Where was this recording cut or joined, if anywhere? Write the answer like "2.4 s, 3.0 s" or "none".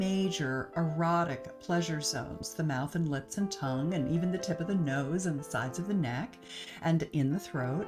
none